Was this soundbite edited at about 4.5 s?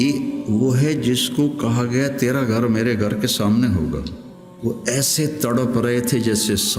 yes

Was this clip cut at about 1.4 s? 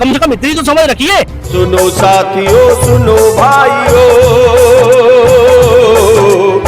yes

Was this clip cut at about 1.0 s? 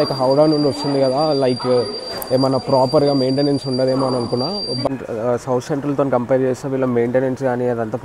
no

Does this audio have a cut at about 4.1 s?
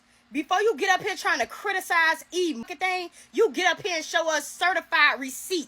no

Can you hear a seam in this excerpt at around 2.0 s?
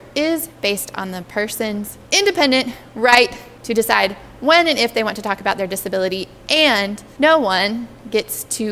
no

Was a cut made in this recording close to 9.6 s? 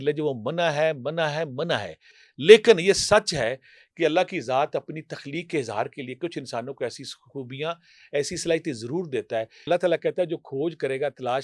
yes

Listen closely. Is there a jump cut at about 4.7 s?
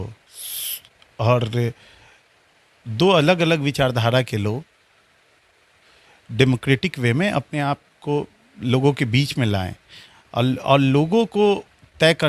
no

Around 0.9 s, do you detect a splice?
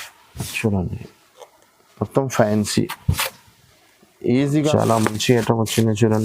no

